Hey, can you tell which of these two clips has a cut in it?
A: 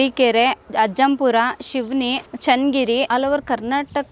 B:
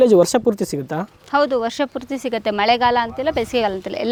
A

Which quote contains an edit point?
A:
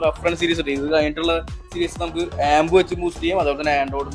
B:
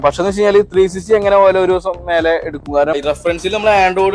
B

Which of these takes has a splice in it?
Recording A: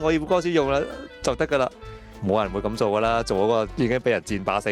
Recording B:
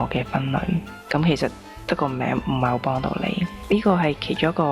B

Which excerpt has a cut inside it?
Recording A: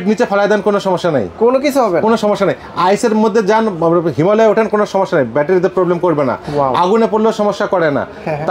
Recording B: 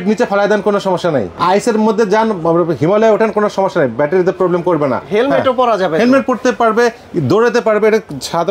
B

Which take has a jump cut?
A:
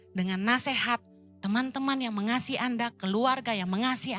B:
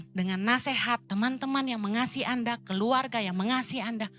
B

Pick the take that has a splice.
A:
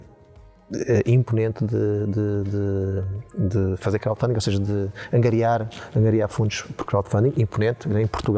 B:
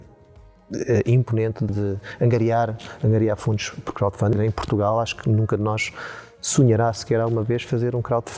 B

